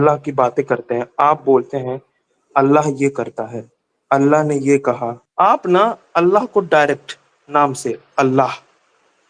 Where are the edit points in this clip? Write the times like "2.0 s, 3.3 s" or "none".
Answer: 5.3 s